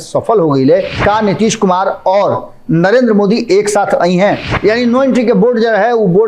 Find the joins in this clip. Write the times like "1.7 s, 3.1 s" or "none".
1.0 s, 4.5 s